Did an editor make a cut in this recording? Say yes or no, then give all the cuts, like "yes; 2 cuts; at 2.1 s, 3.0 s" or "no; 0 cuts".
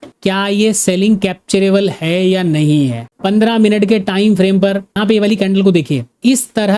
yes; 1 cut; at 5.0 s